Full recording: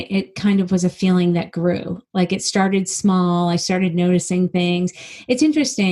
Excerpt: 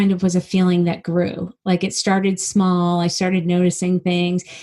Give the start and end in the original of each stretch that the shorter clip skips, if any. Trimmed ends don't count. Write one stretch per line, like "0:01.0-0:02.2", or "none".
none